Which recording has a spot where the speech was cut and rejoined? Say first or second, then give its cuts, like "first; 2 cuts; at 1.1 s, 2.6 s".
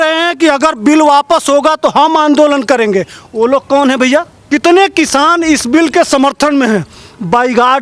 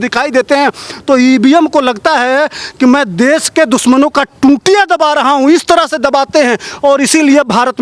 first; 1 cut; at 4.4 s